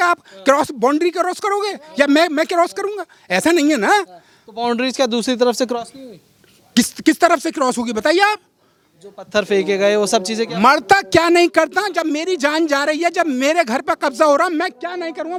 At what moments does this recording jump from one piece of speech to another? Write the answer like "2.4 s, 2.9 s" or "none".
none